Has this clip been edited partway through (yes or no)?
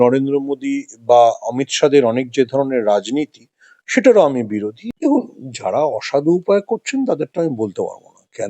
yes